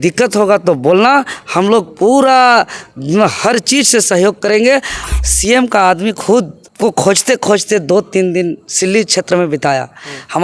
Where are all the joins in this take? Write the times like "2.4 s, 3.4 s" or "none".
5.0 s, 6.6 s

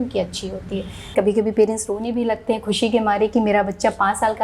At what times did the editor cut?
1.1 s

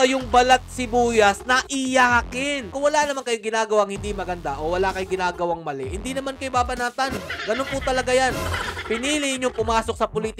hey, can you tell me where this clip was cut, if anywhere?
2.7 s

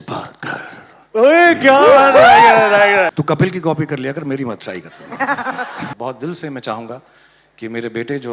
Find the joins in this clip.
3.1 s, 5.9 s

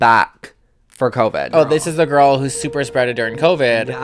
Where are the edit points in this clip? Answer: 1.5 s

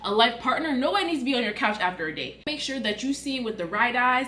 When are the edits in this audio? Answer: 2.5 s

